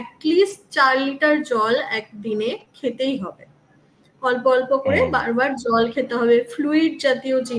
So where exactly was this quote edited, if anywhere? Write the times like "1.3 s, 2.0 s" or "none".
none